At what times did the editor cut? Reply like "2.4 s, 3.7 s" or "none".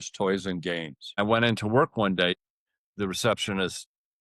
1.2 s, 2.4 s